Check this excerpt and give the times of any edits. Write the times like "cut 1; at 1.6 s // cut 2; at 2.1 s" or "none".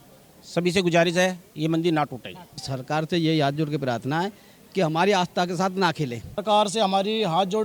cut 1; at 2.7 s // cut 2; at 6.4 s